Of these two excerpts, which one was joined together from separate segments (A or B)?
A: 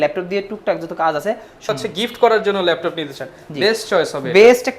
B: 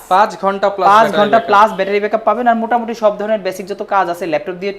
A